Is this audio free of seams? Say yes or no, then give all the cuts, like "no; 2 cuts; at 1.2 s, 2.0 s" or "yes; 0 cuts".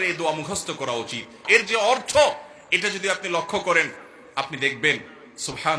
no; 1 cut; at 1.4 s